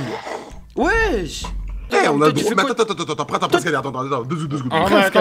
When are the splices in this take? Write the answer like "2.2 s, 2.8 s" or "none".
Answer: 1.8 s